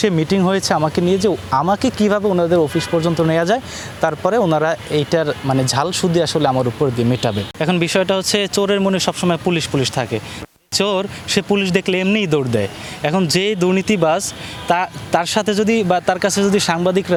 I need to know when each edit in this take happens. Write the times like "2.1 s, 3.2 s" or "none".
none

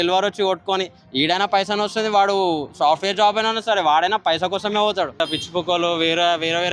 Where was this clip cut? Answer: 5.2 s

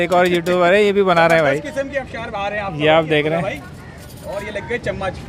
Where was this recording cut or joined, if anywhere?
none

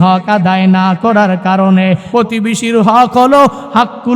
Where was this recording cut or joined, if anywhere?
2.0 s

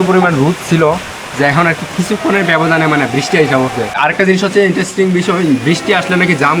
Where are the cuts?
3.9 s

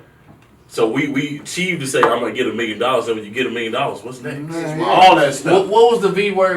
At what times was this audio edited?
4.8 s

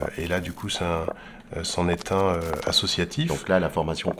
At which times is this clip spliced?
3.3 s

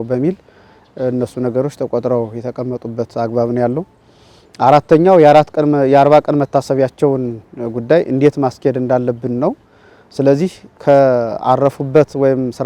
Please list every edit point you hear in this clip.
none

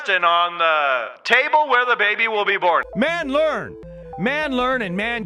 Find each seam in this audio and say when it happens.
1.1 s, 2.8 s

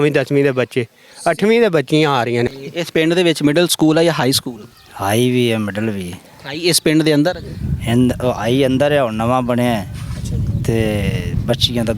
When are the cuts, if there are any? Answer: 2.5 s

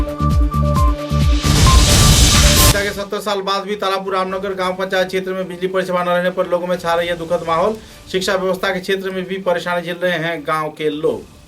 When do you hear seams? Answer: 2.7 s

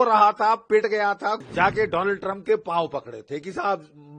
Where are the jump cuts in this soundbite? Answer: 1.4 s

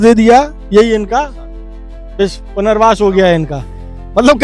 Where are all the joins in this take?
none

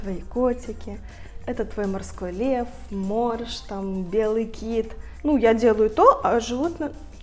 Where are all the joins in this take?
5.1 s

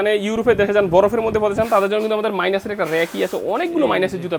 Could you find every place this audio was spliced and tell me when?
none

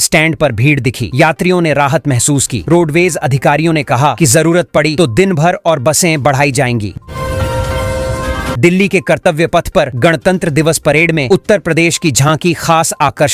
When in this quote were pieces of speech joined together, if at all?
7.1 s, 8.5 s

